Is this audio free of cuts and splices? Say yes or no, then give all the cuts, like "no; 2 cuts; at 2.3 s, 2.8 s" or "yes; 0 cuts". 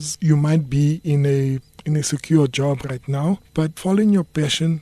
yes; 0 cuts